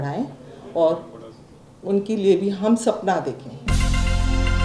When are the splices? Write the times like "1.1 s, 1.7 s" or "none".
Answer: 3.7 s